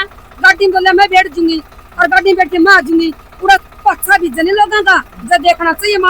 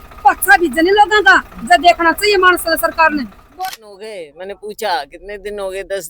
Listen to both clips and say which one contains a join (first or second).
second